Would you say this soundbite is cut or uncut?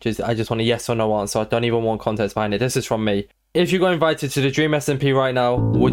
uncut